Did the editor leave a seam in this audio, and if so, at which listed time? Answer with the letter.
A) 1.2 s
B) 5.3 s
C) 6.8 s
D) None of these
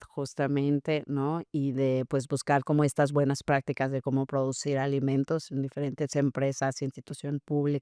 D